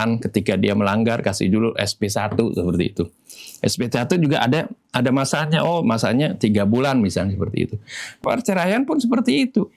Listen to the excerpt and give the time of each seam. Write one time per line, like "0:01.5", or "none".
0:08.2

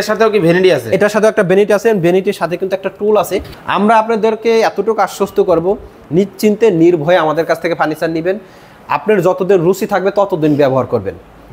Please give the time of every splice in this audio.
0:03.5

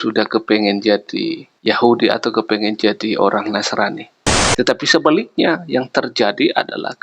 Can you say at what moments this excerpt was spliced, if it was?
0:04.3

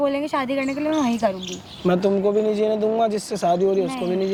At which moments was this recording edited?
none

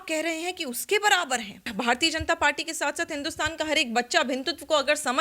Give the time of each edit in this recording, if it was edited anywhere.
0:01.7

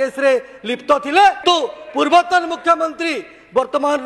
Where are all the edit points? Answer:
0:01.4

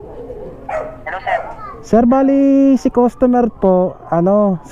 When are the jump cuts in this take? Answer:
none

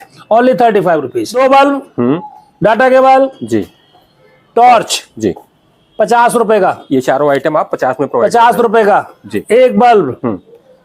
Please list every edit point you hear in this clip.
0:01.2
0:09.3

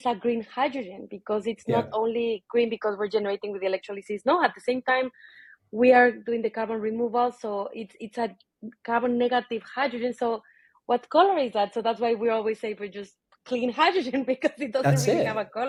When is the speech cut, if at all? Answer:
none

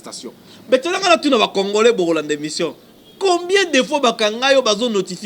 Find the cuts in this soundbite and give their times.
none

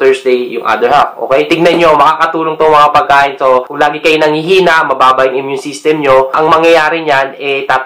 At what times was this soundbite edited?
0:01.5
0:03.7

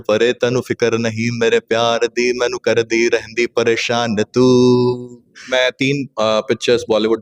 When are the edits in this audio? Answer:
0:05.5

